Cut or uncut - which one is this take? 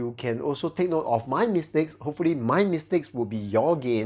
uncut